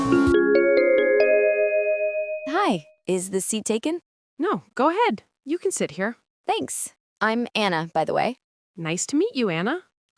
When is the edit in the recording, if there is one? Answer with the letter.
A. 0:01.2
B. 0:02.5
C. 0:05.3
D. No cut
B